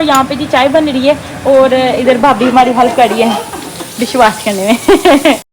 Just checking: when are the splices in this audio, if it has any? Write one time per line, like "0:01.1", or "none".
none